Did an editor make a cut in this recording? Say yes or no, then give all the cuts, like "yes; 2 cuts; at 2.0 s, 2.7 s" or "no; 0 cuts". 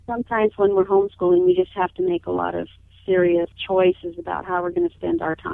no; 0 cuts